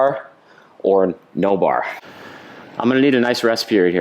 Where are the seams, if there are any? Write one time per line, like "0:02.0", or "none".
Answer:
0:02.0